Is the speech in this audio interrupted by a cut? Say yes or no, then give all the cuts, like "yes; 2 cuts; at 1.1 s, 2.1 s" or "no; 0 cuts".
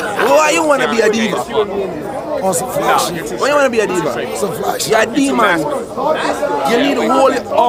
no; 0 cuts